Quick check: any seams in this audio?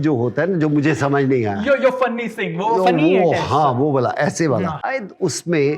yes; 1 cut; at 4.9 s

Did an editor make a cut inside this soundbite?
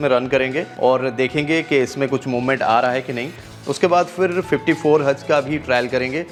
no; 0 cuts

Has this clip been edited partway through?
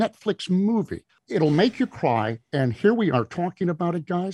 yes; 1 cut; at 1.1 s

